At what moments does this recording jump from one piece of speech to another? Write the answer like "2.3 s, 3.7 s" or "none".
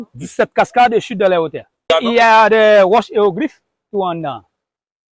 1.9 s